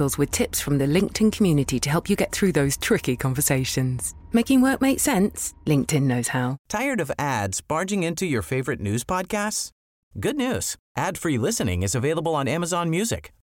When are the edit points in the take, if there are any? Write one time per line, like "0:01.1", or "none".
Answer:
0:06.6